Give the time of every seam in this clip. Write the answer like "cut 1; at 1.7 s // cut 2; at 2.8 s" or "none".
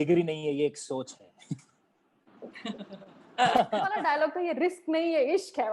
cut 1; at 3.9 s